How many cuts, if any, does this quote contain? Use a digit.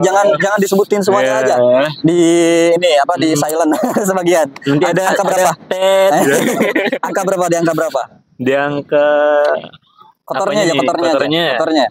0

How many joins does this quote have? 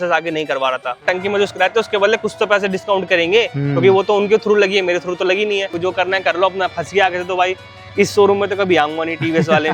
2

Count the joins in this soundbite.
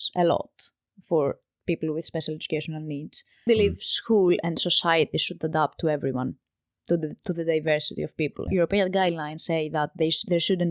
2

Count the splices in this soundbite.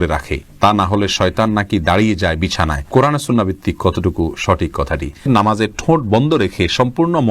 1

